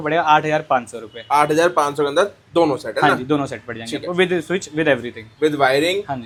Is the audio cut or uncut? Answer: uncut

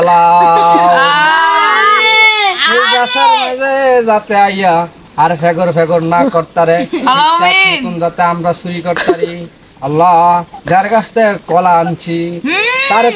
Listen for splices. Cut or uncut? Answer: uncut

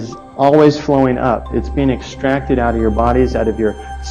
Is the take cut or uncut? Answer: uncut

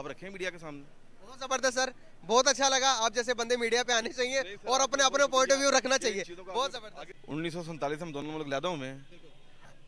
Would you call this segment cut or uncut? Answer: cut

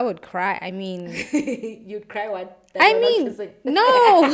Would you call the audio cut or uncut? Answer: uncut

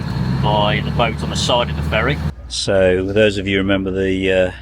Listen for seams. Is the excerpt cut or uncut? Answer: cut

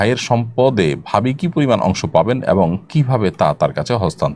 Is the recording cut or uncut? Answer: uncut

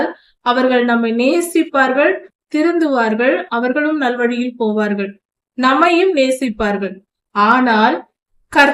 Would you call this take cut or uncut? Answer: uncut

